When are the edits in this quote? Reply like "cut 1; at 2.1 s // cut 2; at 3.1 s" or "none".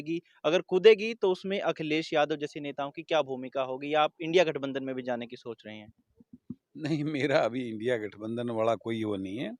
none